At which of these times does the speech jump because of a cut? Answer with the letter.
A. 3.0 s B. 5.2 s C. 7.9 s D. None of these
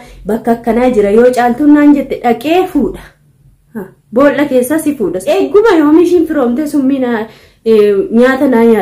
B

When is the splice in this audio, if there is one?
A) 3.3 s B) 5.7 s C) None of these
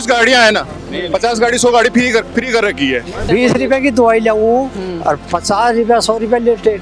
A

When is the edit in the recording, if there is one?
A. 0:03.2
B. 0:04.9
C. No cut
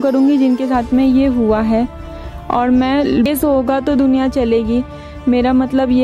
A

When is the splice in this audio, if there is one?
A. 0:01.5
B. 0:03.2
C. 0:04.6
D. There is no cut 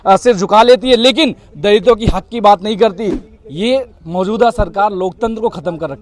B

